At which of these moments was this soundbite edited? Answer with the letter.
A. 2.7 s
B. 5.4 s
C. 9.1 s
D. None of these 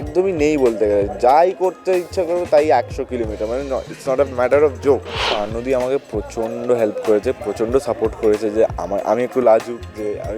B